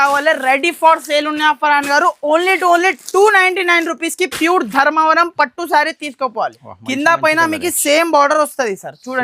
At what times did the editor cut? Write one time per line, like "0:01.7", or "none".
0:06.6